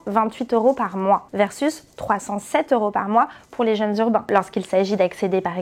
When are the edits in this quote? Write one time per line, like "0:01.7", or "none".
0:04.3